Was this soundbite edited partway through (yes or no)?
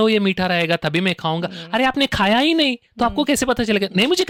no